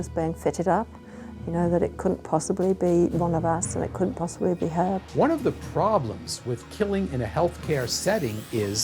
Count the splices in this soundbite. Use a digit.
1